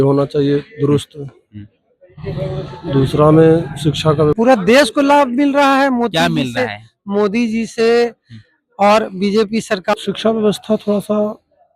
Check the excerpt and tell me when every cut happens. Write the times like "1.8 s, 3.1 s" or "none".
4.3 s, 9.9 s